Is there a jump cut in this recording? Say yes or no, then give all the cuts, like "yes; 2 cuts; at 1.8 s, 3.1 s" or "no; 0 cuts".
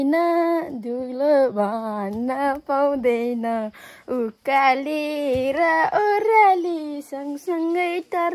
no; 0 cuts